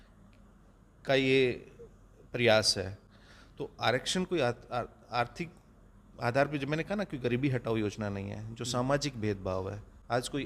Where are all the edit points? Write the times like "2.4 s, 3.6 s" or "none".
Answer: none